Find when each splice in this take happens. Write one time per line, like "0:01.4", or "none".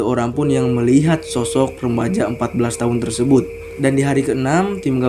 0:03.6